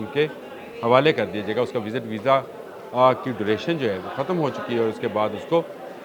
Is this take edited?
no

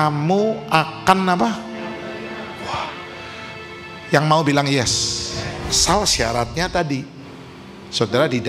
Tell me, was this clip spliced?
yes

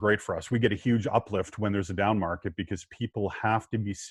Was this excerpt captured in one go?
yes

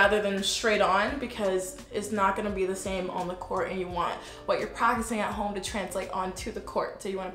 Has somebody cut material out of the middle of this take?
no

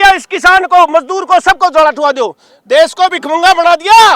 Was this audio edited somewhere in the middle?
yes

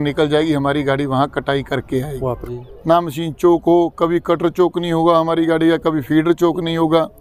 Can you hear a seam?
yes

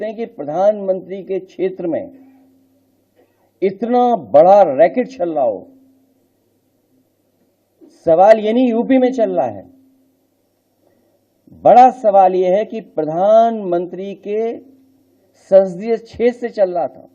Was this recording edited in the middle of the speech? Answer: no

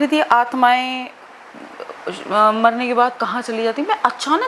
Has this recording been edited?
no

